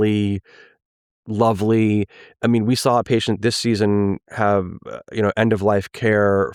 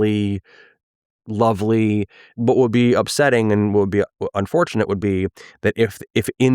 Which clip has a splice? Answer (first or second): second